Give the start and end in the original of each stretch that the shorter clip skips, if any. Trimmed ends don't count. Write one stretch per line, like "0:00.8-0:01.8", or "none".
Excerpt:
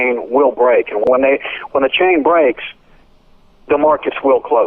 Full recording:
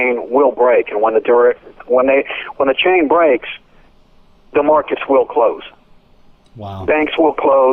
0:01.0-0:01.8